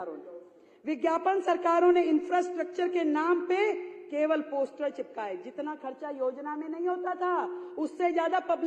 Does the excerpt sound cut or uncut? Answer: uncut